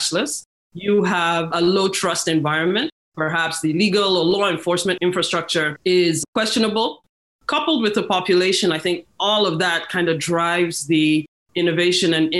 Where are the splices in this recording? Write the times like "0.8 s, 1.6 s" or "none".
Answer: 3.0 s, 5.3 s, 7.1 s